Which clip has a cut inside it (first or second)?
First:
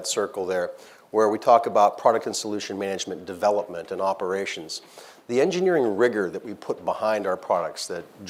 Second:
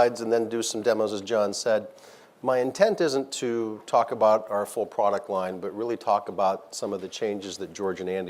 second